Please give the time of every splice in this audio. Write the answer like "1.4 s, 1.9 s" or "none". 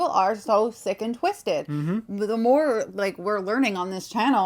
none